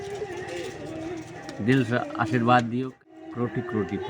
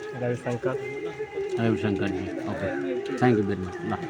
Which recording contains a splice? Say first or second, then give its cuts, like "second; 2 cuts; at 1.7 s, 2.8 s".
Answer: first; 1 cut; at 2.9 s